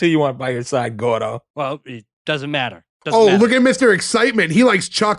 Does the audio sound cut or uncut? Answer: cut